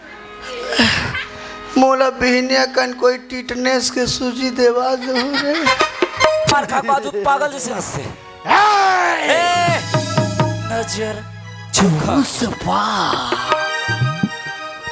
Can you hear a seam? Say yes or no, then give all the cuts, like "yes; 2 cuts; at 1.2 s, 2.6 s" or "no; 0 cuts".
yes; 1 cut; at 6.5 s